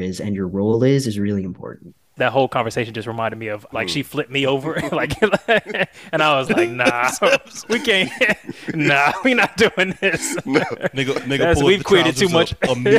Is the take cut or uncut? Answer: cut